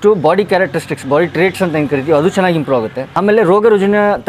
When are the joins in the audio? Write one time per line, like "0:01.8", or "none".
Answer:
0:03.0

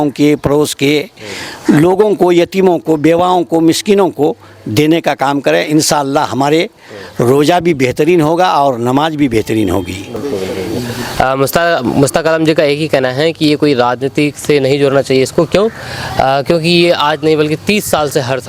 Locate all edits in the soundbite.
none

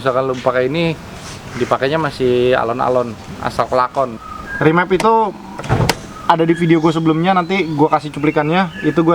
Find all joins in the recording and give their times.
0:04.1

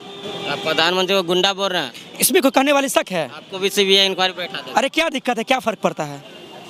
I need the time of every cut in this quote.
none

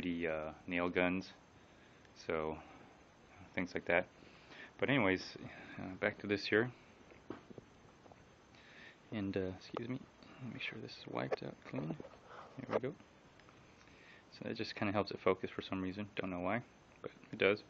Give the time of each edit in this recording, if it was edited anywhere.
0:09.2

